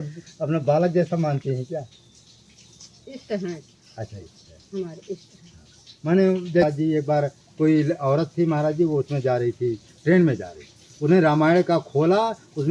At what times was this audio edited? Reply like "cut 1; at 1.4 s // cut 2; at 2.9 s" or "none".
cut 1; at 6.6 s